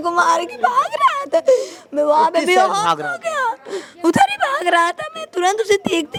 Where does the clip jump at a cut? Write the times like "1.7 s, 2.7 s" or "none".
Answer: none

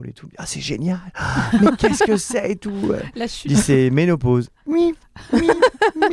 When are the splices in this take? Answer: none

